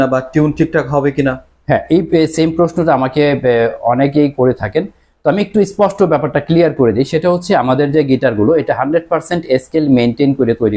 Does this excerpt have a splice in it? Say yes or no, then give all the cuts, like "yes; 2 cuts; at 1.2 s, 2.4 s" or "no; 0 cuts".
no; 0 cuts